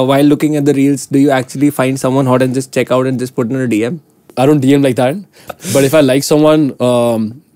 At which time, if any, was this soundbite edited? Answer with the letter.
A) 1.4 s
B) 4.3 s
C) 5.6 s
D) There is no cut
B